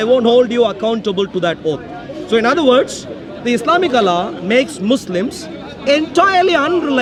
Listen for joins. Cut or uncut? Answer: uncut